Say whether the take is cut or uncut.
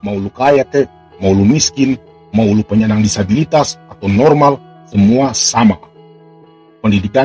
uncut